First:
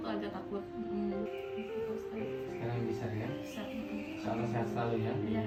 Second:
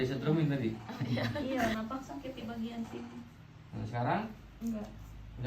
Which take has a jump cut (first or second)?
second